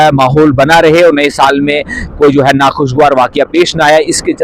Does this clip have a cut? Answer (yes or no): no